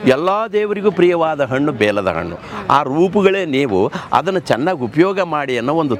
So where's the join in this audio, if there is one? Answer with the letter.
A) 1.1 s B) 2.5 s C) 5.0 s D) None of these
D